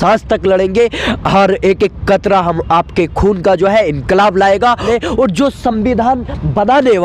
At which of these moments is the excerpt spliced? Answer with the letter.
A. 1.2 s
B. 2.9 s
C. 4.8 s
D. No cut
C